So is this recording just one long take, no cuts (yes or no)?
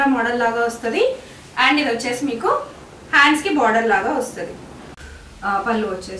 no